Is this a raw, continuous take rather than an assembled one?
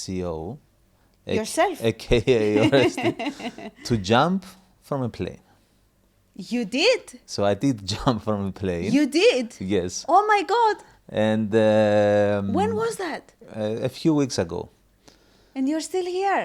yes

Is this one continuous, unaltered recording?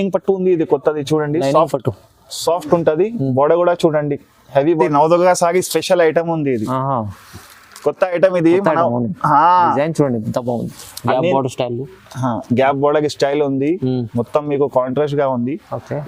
no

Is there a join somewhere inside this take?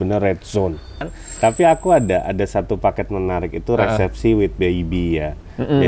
yes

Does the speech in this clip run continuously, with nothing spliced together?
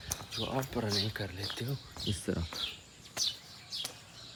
yes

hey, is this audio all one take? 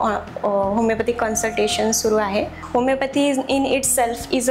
no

